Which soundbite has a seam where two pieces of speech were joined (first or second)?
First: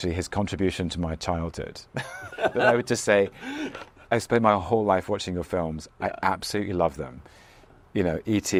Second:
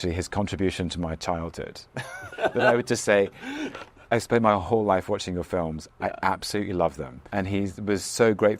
second